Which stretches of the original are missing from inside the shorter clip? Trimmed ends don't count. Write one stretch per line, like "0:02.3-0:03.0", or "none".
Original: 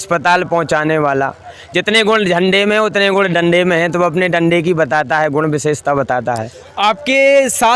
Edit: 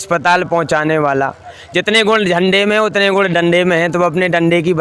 none